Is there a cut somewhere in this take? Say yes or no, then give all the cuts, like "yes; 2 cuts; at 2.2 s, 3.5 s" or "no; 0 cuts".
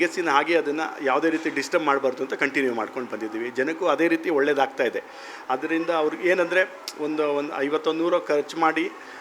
no; 0 cuts